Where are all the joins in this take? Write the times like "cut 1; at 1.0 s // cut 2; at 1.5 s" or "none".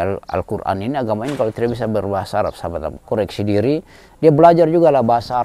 cut 1; at 3.0 s